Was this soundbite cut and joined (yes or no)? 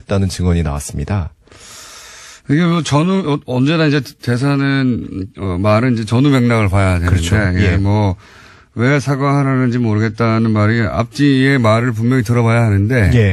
no